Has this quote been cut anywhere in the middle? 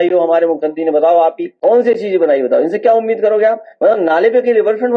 yes; 1 cut; at 1.5 s

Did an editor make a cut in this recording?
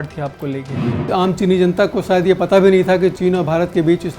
yes; 2 cuts; at 1.0 s, 3.2 s

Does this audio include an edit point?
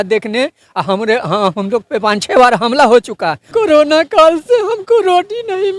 yes; 1 cut; at 3.4 s

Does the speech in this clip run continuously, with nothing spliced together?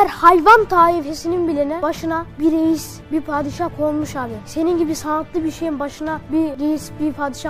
yes; 0 cuts

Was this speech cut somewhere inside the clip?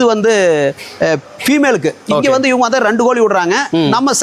no; 0 cuts

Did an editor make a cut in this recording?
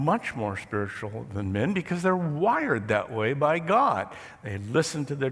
no; 0 cuts

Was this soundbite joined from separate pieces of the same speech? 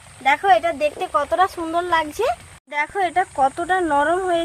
yes; 1 cut; at 2.5 s

